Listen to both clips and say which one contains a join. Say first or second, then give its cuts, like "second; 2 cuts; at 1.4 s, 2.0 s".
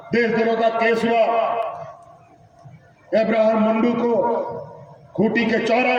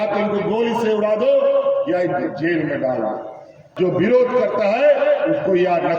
second; 1 cut; at 3.7 s